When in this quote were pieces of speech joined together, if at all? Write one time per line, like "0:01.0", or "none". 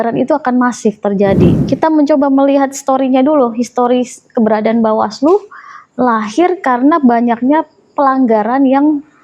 0:01.6